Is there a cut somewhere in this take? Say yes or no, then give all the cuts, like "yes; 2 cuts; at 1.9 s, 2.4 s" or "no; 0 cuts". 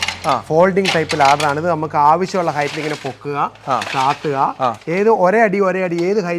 no; 0 cuts